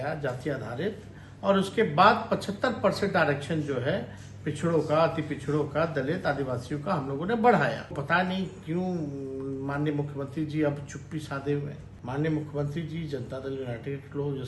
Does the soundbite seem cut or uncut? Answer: cut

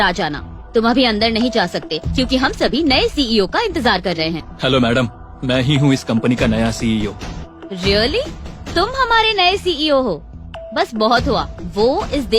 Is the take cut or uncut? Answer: cut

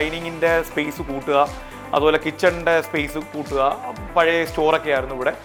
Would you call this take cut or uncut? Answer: uncut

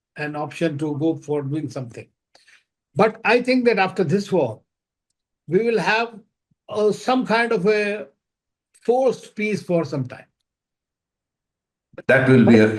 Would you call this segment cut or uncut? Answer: uncut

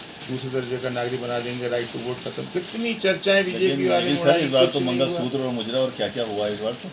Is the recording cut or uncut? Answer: uncut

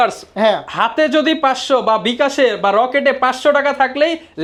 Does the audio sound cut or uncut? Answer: uncut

